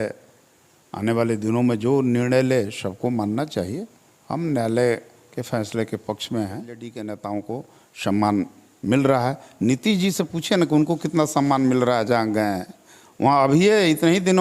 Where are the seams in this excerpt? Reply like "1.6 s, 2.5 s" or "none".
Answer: 7.0 s